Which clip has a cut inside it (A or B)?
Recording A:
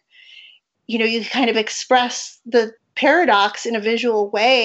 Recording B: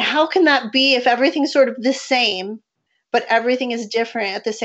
A